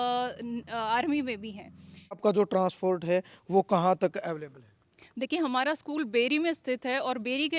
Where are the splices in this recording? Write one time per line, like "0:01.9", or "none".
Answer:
0:02.2